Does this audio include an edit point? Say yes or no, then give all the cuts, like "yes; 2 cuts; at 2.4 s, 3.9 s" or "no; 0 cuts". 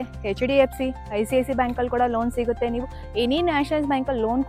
no; 0 cuts